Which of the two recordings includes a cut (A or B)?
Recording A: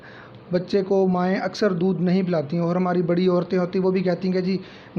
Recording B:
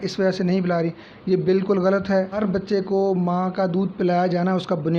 B